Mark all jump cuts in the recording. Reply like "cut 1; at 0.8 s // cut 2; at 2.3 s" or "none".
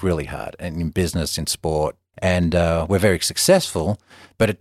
cut 1; at 2.0 s